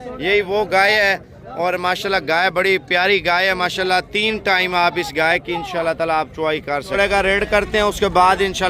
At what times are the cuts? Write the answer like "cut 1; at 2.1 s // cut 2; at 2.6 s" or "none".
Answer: cut 1; at 6.9 s